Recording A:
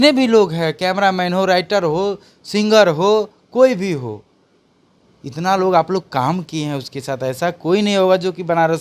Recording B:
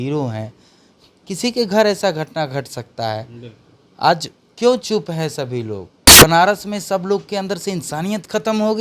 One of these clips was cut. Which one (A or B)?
B